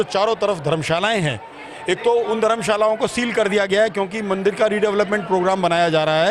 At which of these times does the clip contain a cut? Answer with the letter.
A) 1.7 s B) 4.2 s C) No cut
C